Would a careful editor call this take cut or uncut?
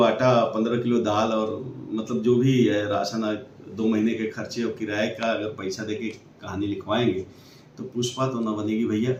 uncut